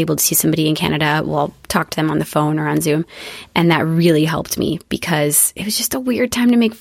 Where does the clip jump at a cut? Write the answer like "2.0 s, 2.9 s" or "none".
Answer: none

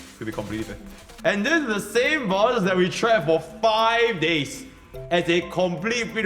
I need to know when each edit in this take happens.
1.0 s

